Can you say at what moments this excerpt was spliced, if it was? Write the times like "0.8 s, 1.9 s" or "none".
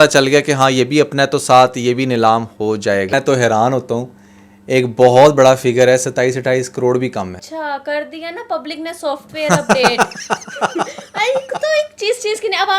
3.1 s, 7.5 s